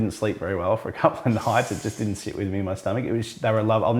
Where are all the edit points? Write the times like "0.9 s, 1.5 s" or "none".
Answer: none